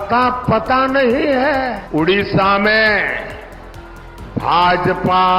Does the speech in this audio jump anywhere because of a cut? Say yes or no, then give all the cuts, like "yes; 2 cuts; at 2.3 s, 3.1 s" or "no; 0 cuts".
yes; 1 cut; at 1.8 s